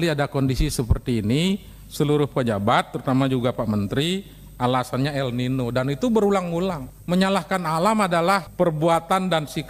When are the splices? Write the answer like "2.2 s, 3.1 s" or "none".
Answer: 6.9 s